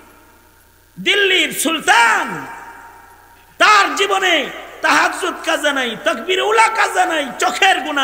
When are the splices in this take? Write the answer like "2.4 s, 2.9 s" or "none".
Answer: none